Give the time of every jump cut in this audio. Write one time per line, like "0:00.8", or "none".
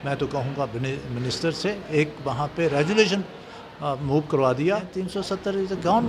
0:05.0